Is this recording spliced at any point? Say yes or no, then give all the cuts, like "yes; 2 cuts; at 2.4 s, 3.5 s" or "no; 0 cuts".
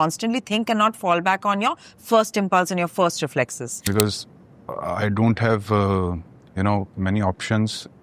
yes; 1 cut; at 3.8 s